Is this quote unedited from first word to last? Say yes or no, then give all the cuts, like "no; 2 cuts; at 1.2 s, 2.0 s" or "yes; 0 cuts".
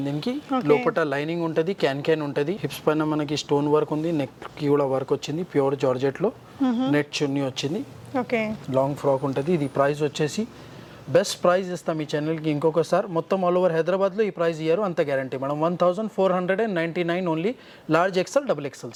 yes; 0 cuts